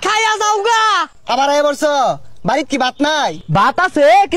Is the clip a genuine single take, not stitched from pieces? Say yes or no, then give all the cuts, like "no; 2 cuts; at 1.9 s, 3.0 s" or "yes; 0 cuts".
no; 2 cuts; at 1.1 s, 3.4 s